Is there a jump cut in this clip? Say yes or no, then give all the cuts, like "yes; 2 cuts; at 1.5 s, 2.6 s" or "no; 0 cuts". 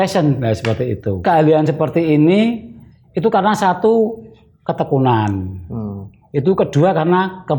yes; 1 cut; at 1.2 s